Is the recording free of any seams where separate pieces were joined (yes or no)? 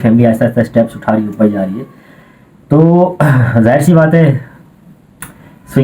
yes